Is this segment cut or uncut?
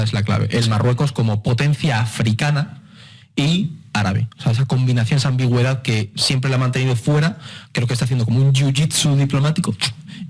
uncut